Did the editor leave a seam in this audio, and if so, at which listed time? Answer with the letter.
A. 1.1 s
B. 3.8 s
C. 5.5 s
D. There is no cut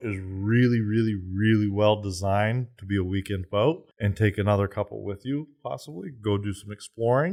D